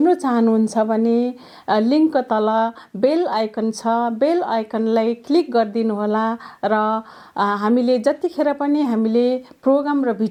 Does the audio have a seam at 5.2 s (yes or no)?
no